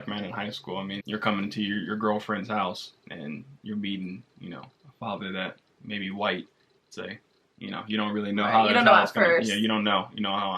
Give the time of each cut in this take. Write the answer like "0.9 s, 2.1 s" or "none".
1.0 s